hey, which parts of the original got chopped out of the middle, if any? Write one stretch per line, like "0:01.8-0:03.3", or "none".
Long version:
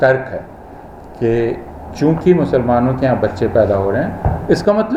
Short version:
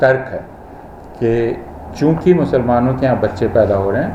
none